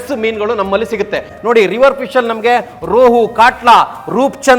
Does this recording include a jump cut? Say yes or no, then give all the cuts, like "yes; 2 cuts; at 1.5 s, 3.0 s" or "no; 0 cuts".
yes; 1 cut; at 1.3 s